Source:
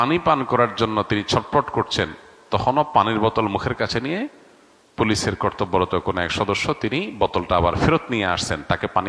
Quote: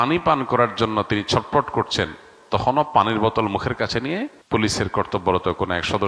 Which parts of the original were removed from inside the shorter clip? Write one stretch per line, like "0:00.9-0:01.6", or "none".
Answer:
0:04.4-0:04.8